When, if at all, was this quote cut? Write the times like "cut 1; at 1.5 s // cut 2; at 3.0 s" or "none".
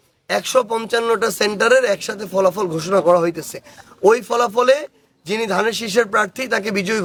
none